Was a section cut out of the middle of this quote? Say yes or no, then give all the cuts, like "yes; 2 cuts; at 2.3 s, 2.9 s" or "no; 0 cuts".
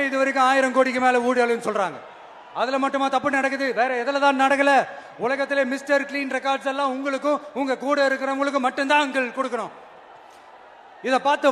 no; 0 cuts